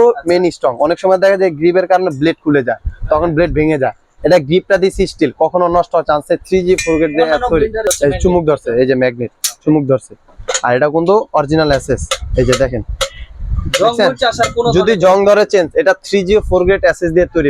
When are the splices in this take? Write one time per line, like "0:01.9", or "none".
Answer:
0:07.9